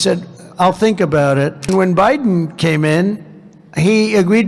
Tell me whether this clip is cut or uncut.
cut